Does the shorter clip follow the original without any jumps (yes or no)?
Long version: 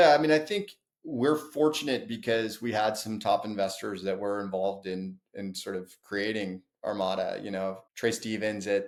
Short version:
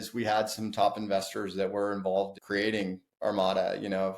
no